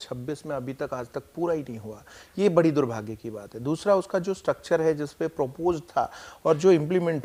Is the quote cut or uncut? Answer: uncut